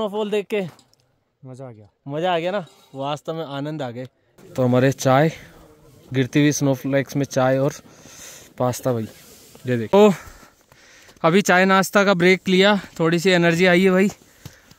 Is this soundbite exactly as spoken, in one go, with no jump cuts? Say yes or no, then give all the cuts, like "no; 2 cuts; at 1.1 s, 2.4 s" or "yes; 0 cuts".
no; 2 cuts; at 4.2 s, 9.9 s